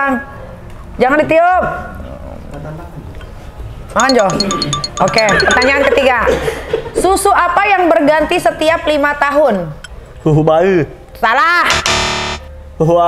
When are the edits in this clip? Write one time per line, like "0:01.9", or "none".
none

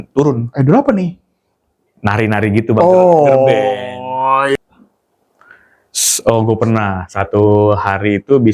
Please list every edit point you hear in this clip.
0:04.6

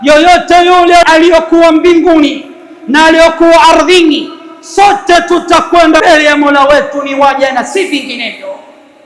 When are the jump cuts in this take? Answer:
0:01.0
0:06.0

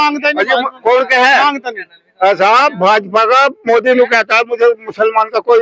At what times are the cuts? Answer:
none

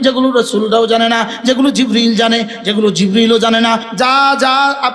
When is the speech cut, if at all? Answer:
0:03.9

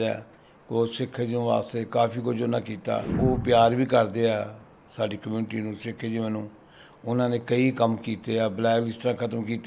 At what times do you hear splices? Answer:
0:03.1

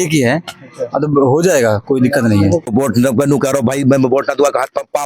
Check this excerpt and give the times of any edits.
0:02.6

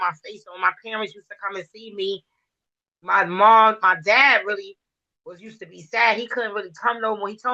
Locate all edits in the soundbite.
none

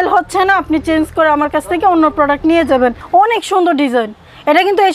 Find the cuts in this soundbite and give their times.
0:03.0

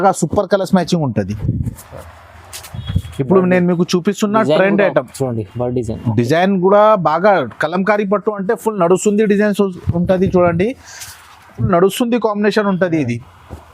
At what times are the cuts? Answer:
0:01.4
0:11.6

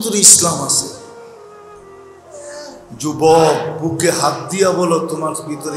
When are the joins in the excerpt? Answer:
0:00.9
0:02.3

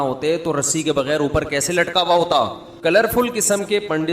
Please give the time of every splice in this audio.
0:02.6

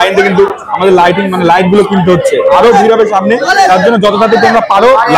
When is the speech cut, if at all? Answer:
none

